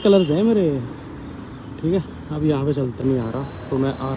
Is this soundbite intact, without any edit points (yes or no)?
no